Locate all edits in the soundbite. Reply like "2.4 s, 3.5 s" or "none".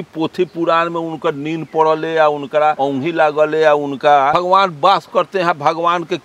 2.8 s, 4.3 s